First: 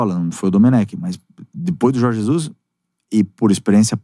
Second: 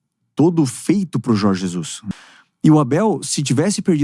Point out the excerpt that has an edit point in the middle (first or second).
second